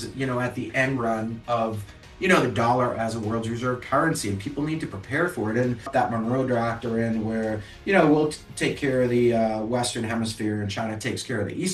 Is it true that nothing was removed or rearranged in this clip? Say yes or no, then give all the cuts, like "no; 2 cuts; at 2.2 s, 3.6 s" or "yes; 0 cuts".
yes; 0 cuts